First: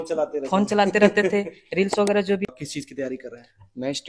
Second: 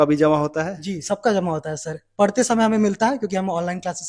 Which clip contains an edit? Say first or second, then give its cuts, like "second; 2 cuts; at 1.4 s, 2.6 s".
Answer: first; 1 cut; at 2.4 s